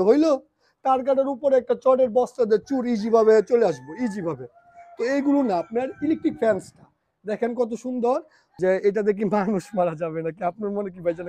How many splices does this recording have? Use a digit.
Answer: 1